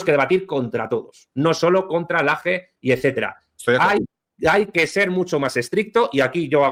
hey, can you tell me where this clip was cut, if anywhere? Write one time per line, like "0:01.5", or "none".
none